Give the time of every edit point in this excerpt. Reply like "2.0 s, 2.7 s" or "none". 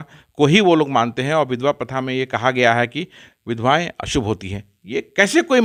none